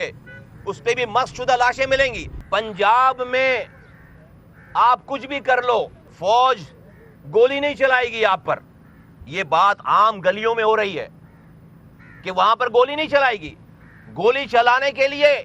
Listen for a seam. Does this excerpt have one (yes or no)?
yes